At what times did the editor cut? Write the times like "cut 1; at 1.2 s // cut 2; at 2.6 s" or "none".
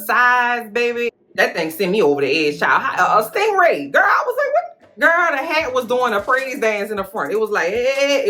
none

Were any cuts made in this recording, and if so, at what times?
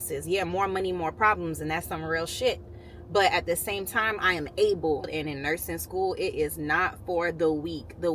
cut 1; at 5.1 s

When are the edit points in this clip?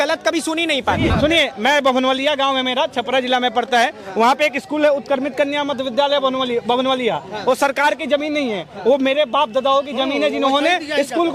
cut 1; at 1.0 s

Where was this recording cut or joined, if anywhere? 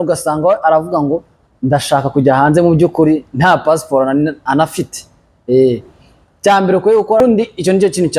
cut 1; at 7.2 s

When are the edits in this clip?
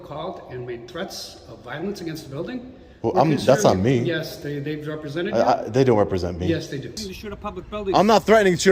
cut 1; at 6.9 s

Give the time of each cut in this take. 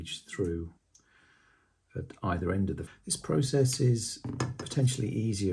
cut 1; at 2.8 s

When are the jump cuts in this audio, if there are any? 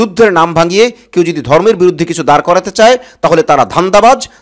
none

